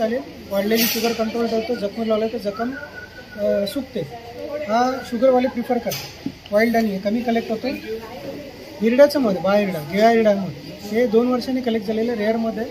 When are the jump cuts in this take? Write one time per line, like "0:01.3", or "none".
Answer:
none